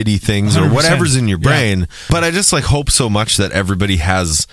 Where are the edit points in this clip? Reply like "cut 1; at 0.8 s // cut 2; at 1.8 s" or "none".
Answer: cut 1; at 2.0 s